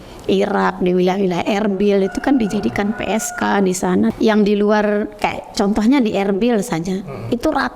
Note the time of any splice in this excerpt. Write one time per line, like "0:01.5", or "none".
0:04.1